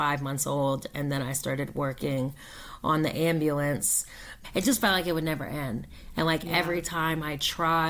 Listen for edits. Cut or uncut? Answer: cut